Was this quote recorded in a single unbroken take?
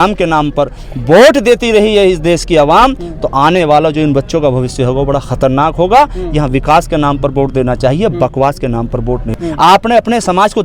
yes; 0 cuts

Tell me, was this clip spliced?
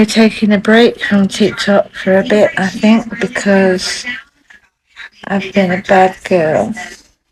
no; 0 cuts

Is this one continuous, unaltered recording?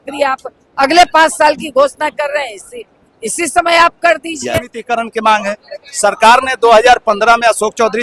no; 1 cut; at 4.8 s

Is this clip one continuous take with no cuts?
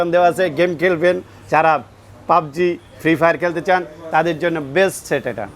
yes; 0 cuts

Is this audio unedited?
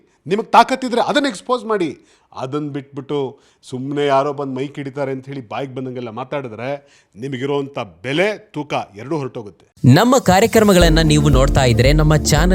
yes; 0 cuts

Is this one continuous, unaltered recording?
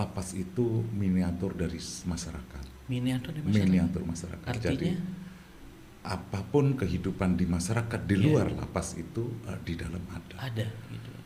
yes; 0 cuts

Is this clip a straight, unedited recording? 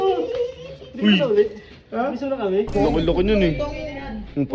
no; 1 cut; at 2.7 s

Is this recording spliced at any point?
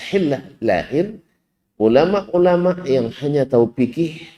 no; 0 cuts

